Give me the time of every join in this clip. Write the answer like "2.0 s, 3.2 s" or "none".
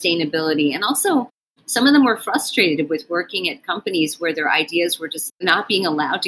5.3 s